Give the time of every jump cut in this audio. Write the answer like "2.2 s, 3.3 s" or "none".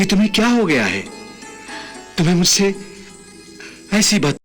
none